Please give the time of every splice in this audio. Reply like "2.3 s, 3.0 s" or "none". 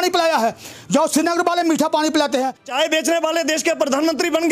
2.6 s